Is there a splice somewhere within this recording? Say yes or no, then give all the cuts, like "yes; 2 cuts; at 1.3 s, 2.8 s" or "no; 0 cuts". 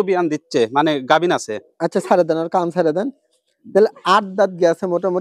no; 0 cuts